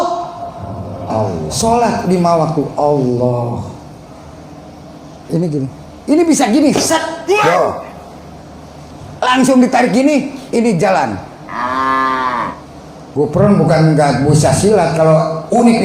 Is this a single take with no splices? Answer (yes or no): no